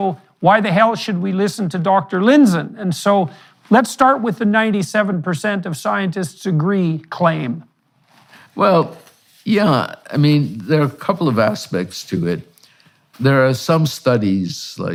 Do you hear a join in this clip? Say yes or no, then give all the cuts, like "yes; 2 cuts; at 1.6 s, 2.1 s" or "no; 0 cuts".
no; 0 cuts